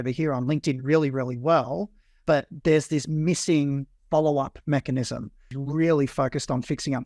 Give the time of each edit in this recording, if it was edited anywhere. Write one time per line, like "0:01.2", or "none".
0:05.6